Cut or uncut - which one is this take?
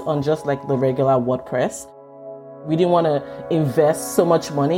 cut